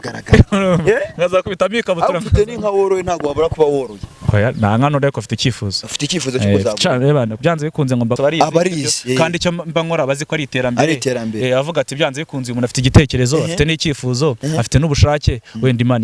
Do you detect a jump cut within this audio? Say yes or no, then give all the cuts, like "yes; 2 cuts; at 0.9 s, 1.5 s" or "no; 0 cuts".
yes; 1 cut; at 8.2 s